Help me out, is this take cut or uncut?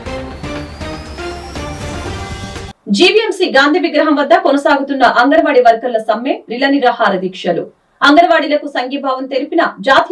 cut